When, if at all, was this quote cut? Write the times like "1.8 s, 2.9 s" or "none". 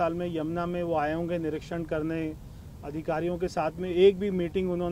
none